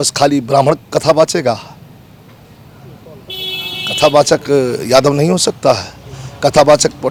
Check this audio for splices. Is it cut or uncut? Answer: uncut